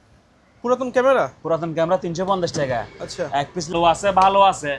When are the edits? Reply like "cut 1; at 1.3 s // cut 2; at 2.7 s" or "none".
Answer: cut 1; at 3.7 s